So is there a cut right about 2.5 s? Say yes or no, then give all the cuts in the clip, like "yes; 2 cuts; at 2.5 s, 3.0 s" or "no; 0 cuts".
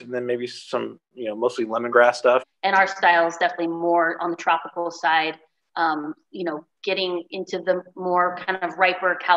yes; 1 cut; at 2.5 s